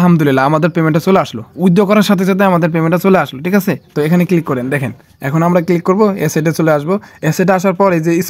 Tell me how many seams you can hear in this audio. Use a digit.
0